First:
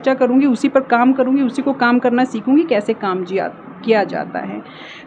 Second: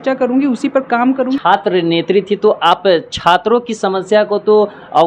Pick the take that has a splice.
second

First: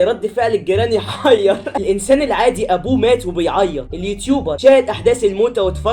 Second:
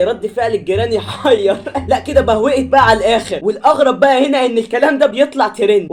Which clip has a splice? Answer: first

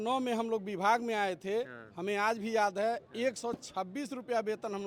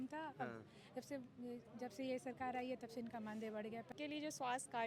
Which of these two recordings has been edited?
second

